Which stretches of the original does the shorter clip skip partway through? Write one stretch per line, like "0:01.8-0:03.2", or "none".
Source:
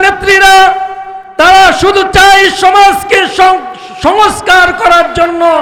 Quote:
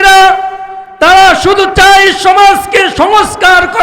0:03.3-0:04.0